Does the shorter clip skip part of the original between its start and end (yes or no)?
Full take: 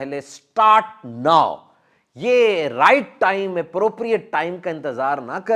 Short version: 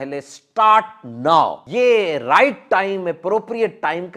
yes